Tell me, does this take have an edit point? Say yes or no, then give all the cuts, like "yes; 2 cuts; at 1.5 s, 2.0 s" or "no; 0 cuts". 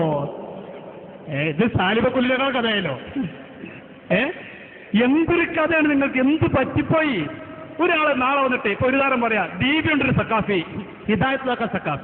yes; 1 cut; at 3.3 s